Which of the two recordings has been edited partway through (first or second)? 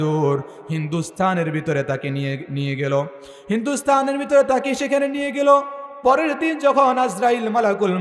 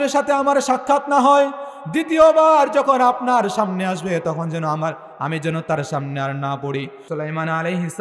second